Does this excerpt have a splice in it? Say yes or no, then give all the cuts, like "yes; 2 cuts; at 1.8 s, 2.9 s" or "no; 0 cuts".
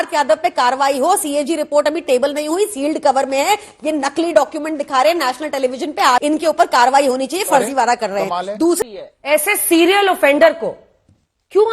yes; 2 cuts; at 6.2 s, 8.8 s